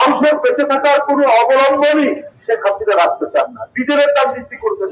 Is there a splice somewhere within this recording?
yes; 1 cut; at 2.3 s

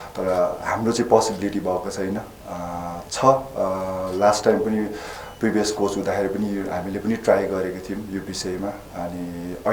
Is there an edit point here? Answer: no; 0 cuts

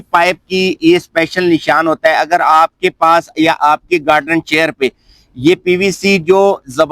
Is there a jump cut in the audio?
no; 0 cuts

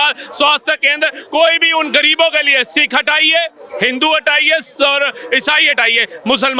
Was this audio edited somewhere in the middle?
no; 0 cuts

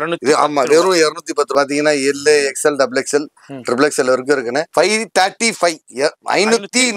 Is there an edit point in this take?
yes; 2 cuts; at 1.5 s, 4.7 s

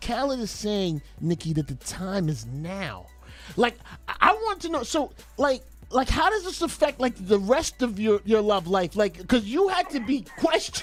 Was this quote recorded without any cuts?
yes; 0 cuts

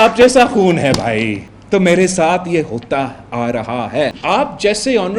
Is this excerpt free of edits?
no; 2 cuts; at 1.5 s, 4.2 s

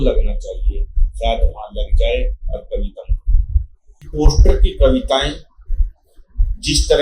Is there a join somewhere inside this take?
yes; 1 cut; at 4.1 s

